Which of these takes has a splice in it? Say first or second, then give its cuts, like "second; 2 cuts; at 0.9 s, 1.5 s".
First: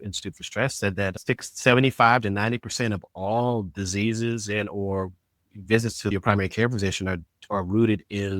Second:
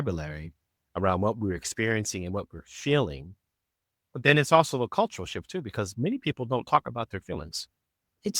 first; 2 cuts; at 1.2 s, 6.1 s